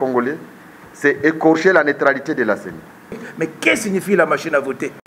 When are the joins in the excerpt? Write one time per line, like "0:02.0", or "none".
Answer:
0:03.3